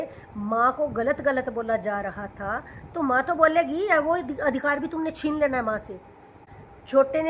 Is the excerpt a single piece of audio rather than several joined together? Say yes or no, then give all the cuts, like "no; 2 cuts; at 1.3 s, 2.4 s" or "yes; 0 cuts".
no; 1 cut; at 6.4 s